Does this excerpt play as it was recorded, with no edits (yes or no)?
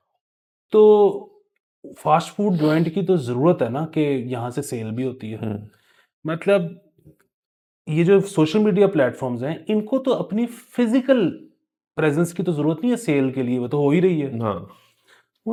yes